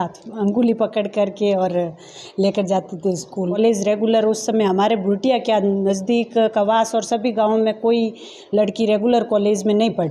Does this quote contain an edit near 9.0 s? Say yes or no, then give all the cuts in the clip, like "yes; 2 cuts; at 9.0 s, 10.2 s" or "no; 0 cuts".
no; 1 cut; at 3.6 s